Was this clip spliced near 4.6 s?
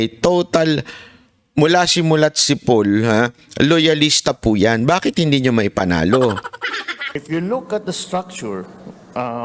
no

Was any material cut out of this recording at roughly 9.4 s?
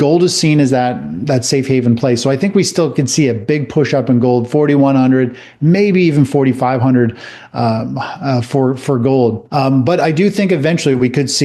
yes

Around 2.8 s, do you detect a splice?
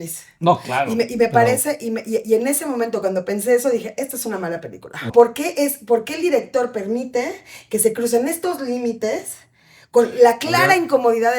no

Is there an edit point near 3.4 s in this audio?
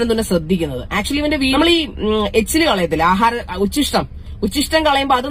no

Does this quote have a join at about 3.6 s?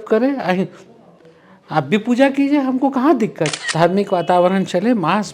yes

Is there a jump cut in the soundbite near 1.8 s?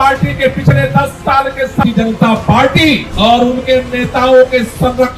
yes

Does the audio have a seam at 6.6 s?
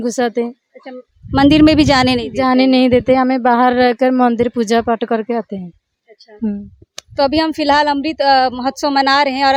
no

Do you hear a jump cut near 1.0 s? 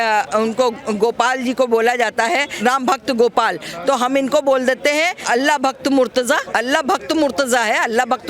no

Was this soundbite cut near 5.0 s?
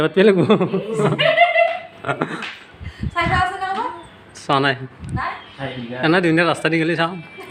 no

